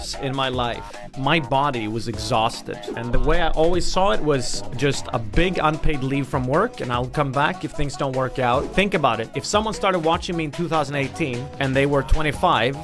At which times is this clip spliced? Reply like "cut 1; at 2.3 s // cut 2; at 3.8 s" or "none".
cut 1; at 1.1 s // cut 2; at 2.9 s // cut 3; at 8.7 s